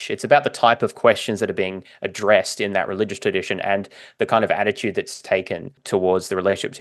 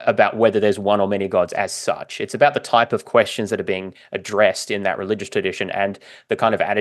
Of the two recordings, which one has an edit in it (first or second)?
first